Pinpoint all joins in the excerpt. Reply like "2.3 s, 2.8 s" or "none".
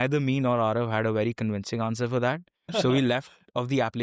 2.7 s